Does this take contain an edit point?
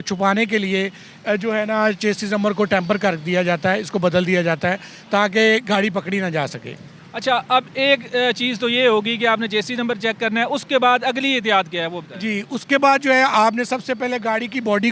no; 0 cuts

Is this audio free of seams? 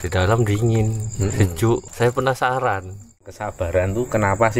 no; 1 cut; at 3.3 s

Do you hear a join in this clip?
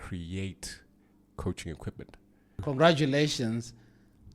yes; 1 cut; at 2.6 s

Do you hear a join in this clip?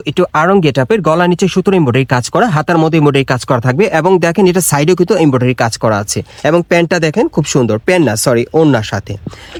no; 0 cuts

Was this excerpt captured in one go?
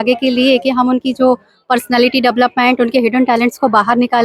yes; 0 cuts

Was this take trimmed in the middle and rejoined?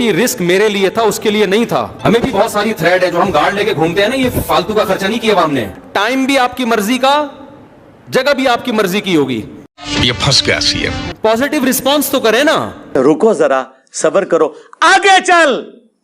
no; 0 cuts

